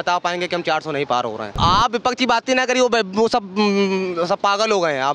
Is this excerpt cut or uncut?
cut